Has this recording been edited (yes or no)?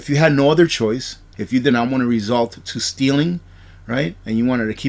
yes